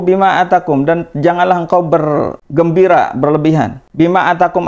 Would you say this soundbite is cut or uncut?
cut